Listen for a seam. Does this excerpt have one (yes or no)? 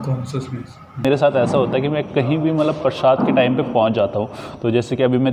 yes